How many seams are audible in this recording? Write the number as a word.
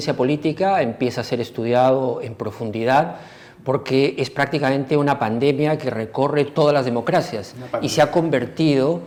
zero